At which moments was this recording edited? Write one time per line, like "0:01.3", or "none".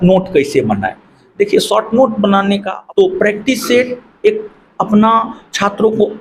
0:02.7